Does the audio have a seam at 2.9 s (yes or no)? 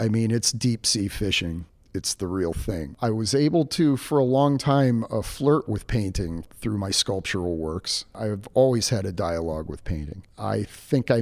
yes